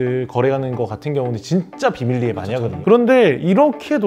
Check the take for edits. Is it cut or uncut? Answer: uncut